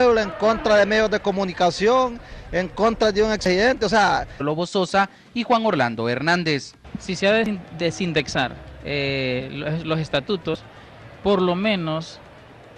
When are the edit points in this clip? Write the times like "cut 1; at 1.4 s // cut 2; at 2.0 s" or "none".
none